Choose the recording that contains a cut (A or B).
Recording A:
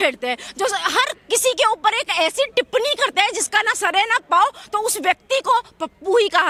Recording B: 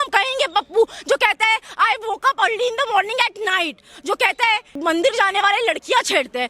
B